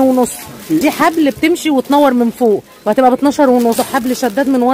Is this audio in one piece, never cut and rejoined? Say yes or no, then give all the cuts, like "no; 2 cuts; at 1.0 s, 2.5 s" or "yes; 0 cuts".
no; 2 cuts; at 0.8 s, 3.8 s